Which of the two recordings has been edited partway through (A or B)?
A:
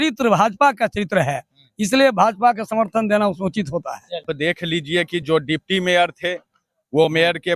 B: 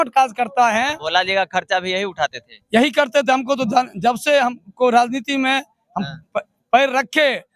A